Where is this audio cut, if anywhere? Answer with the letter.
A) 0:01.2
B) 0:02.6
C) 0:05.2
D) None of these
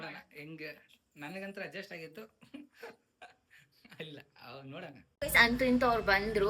C